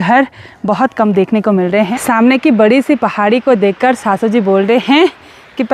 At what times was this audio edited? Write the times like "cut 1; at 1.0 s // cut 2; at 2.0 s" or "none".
cut 1; at 1.9 s